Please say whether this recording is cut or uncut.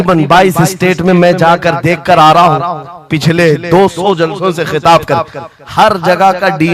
uncut